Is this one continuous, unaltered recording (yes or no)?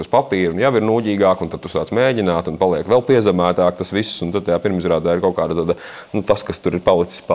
yes